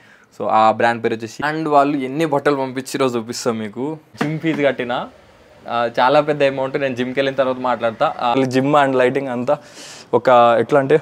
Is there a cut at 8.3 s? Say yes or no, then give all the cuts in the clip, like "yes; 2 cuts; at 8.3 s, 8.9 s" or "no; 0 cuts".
yes; 3 cuts; at 1.4 s, 4.0 s, 8.3 s